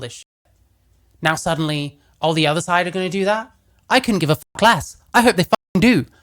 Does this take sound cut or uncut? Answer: uncut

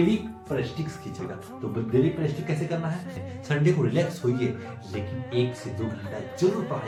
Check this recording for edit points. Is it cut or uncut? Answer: uncut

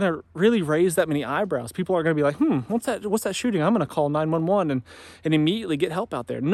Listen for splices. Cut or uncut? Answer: uncut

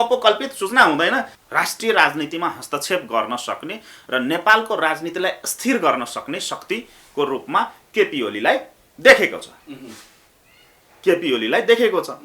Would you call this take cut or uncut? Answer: cut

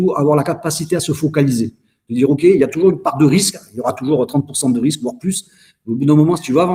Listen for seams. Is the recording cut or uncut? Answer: uncut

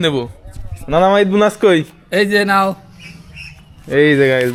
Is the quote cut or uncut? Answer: uncut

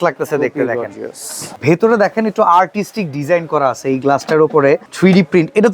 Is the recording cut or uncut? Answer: cut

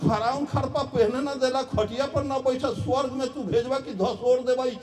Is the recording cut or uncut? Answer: uncut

